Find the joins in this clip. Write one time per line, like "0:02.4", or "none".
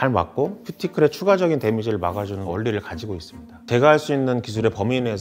0:03.7